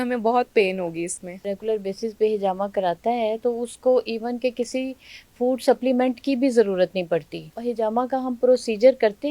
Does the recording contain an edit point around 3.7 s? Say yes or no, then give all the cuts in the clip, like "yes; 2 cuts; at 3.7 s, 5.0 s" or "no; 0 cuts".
no; 2 cuts; at 1.5 s, 7.6 s